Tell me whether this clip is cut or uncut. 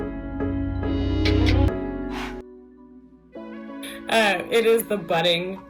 cut